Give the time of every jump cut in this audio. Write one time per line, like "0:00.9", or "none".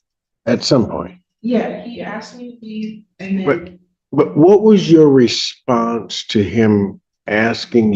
none